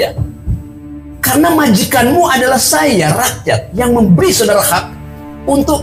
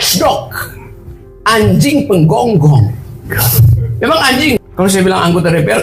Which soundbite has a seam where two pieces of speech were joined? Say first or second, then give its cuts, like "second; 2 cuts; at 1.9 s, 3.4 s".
second; 1 cut; at 4.6 s